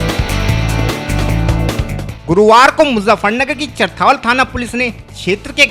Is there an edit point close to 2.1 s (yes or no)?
yes